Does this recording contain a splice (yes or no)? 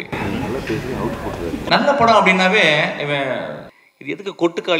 yes